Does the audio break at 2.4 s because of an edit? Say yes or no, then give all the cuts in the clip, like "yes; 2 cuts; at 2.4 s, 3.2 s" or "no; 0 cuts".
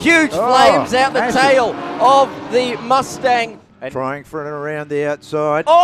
no; 1 cut; at 3.6 s